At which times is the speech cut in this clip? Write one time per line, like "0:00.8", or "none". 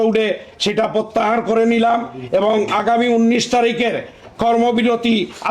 none